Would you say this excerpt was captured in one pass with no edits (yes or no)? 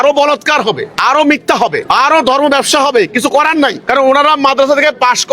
no